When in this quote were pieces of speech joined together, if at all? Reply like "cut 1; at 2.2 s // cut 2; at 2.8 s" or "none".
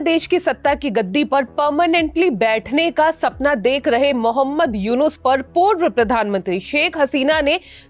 none

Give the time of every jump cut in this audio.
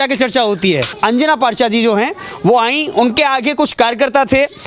cut 1; at 0.9 s

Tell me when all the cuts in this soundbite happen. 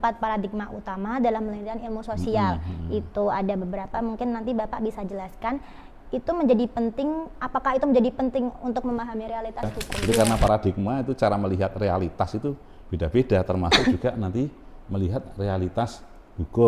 cut 1; at 9.9 s

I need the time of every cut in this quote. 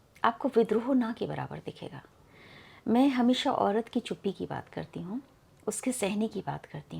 none

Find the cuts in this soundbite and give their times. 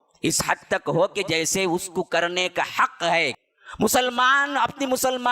cut 1; at 3.3 s

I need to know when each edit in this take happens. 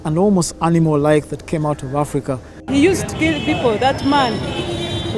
cut 1; at 2.5 s

